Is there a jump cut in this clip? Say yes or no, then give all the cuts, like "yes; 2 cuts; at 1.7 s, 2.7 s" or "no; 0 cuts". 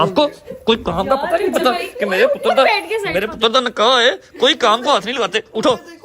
no; 0 cuts